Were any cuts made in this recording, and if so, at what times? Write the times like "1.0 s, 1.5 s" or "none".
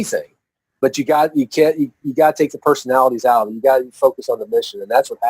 none